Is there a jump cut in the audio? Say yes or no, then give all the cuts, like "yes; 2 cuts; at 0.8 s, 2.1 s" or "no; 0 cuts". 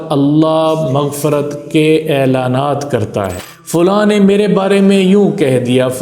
yes; 1 cut; at 3.4 s